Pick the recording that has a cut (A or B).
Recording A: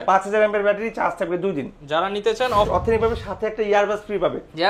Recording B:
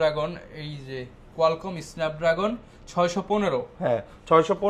A